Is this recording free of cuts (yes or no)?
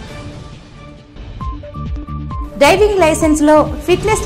no